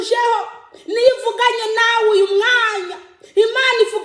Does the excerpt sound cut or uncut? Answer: uncut